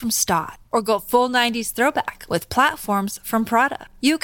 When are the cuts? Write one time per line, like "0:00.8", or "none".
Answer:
none